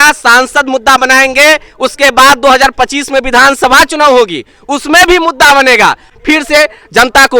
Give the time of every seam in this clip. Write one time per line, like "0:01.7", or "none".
0:06.1